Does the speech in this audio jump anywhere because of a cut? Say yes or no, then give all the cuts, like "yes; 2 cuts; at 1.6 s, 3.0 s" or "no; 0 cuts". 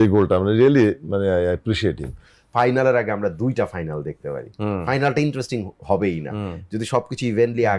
yes; 1 cut; at 2.4 s